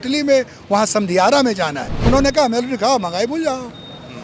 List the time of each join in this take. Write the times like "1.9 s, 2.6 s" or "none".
1.9 s